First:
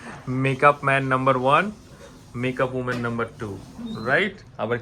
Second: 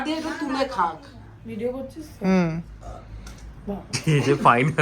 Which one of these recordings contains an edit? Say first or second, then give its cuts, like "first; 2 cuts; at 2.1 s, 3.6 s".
second; 1 cut; at 3.9 s